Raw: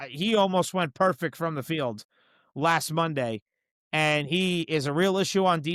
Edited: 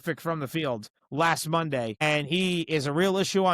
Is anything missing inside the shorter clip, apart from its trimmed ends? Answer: yes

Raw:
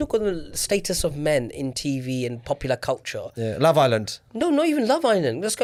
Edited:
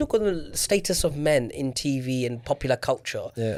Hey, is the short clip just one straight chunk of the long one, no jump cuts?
yes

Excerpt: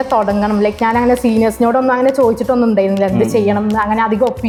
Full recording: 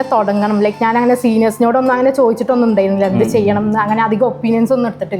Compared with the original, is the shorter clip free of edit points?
yes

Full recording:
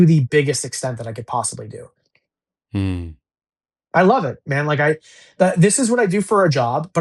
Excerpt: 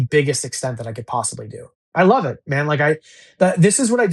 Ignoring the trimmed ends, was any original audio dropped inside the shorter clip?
yes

